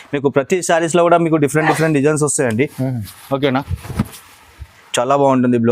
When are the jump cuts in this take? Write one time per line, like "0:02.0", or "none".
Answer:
0:04.8